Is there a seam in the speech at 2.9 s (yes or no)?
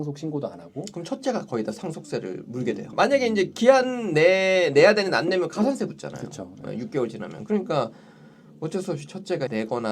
yes